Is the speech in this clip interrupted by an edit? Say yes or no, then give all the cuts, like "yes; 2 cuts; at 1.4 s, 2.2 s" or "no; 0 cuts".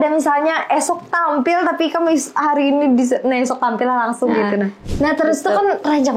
yes; 1 cut; at 4.8 s